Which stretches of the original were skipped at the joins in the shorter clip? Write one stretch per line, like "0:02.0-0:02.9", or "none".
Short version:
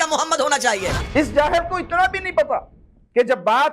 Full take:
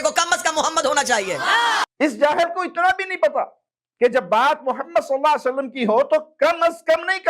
0:01.5-0:01.9